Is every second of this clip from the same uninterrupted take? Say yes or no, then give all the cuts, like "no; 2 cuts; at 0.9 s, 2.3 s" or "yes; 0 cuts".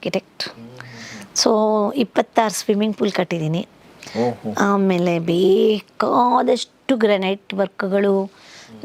yes; 0 cuts